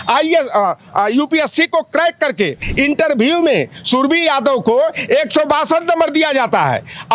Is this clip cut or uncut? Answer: cut